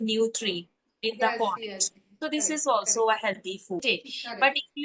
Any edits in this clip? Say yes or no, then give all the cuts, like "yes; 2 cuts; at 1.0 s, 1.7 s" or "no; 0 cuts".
yes; 1 cut; at 3.8 s